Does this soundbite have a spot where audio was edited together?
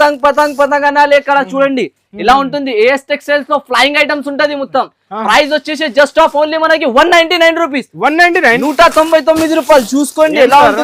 no; 0 cuts

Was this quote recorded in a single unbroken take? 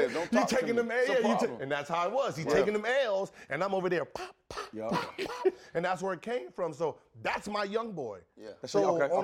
yes; 0 cuts

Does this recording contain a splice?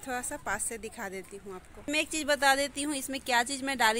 yes; 1 cut; at 1.8 s

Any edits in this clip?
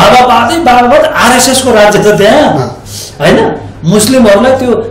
no; 0 cuts

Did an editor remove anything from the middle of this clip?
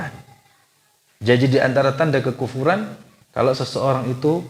yes; 1 cut; at 3.2 s

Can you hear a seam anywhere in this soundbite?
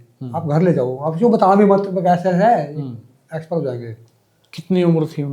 yes; 1 cut; at 4.1 s

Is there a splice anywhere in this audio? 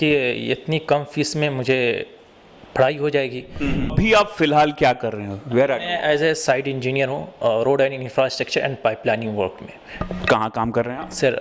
yes; 1 cut; at 3.9 s

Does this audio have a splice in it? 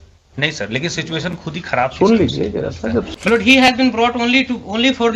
yes; 1 cut; at 3.1 s

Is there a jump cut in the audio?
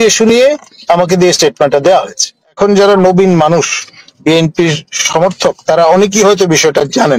yes; 1 cut; at 2.6 s

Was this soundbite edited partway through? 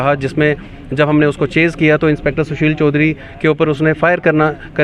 no; 0 cuts

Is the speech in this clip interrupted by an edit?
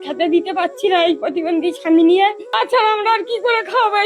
yes; 1 cut; at 2.4 s

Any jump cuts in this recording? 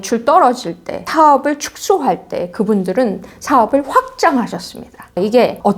yes; 1 cut; at 1.1 s

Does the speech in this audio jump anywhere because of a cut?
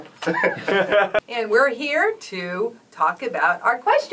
yes; 1 cut; at 1.2 s

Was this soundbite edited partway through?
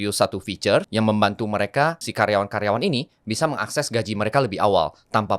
yes; 2 cuts; at 0.9 s, 2.0 s

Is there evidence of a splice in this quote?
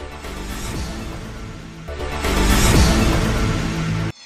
no; 0 cuts

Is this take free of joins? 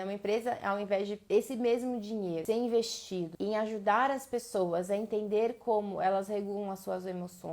no; 3 cuts; at 1.2 s, 2.4 s, 3.3 s

